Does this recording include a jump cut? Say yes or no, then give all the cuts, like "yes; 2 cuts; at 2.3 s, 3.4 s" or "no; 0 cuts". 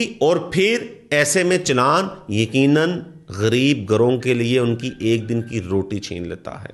no; 0 cuts